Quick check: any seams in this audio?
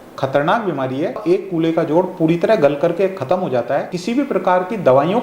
yes; 2 cuts; at 1.2 s, 3.9 s

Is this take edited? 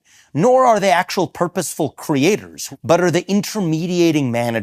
yes; 1 cut; at 2.6 s

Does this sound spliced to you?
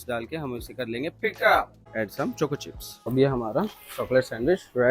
yes; 1 cut; at 1.9 s

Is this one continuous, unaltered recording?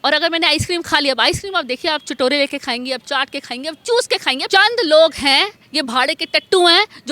no; 1 cut; at 4.3 s

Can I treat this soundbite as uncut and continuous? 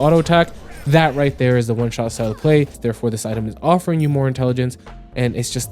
no; 1 cut; at 2.8 s

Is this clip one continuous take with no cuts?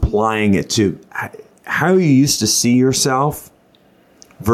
yes; 0 cuts

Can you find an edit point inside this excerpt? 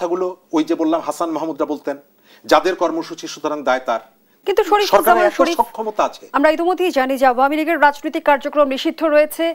yes; 1 cut; at 4.3 s

